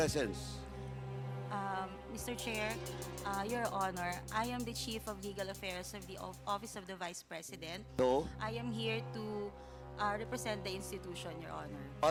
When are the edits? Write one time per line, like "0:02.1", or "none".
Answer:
none